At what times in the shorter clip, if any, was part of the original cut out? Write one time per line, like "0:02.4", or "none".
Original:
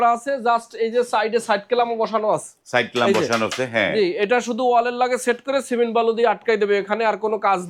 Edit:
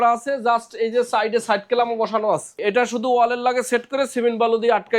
0:02.6